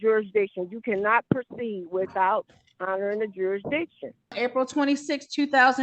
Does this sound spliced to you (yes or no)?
yes